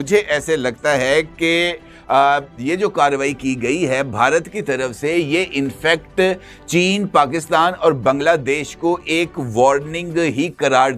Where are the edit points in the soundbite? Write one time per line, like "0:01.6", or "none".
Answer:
none